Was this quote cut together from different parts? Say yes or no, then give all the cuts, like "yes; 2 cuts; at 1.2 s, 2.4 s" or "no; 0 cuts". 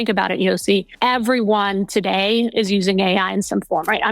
yes; 1 cut; at 0.9 s